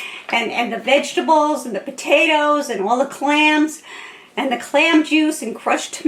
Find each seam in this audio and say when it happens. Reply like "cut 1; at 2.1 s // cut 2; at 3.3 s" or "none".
none